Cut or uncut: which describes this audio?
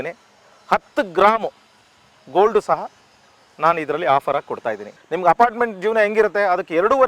cut